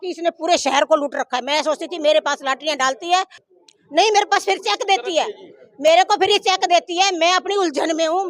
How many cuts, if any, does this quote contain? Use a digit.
1